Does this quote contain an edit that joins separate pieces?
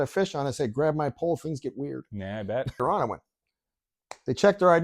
yes; 1 cut; at 2.8 s

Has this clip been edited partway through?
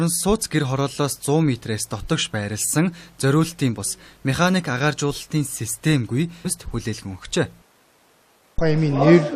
no; 0 cuts

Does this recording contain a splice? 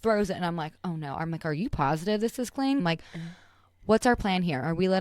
yes; 1 cut; at 2.8 s

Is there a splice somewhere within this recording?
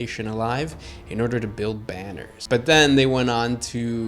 yes; 1 cut; at 2.4 s

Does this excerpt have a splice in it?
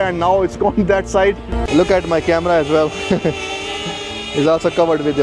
yes; 1 cut; at 1.5 s

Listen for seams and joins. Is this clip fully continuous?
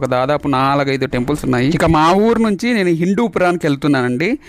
yes; 0 cuts

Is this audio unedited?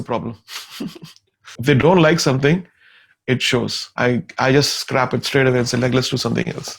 no; 2 cuts; at 1.5 s, 3.8 s

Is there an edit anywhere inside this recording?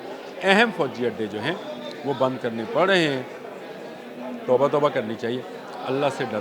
no; 0 cuts

